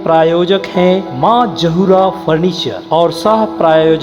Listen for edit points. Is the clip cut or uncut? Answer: uncut